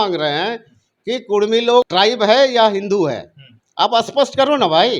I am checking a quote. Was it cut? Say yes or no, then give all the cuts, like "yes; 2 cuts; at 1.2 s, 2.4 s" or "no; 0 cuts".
yes; 1 cut; at 1.9 s